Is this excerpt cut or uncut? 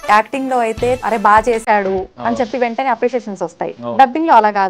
cut